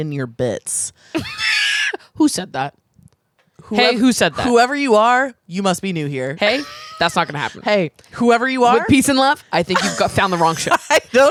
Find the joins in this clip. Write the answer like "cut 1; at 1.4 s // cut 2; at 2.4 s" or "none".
none

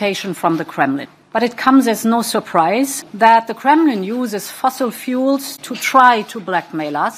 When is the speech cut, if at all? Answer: cut 1; at 1.1 s // cut 2; at 3.0 s

